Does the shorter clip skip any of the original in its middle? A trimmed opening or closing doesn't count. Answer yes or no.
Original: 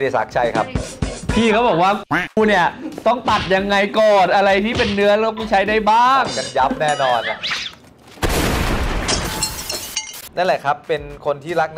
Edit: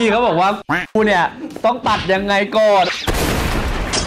yes